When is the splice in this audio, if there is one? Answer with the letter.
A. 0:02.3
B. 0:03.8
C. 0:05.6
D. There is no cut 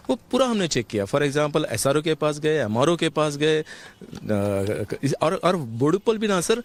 D